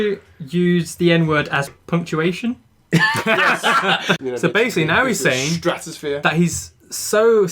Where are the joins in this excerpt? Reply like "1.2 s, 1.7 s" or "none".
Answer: 1.7 s, 4.2 s